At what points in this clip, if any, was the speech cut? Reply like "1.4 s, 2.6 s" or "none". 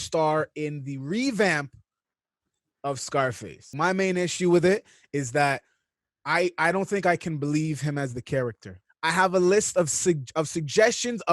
3.7 s, 8.8 s